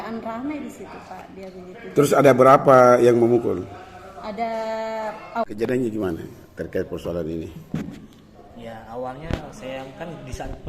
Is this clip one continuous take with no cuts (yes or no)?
no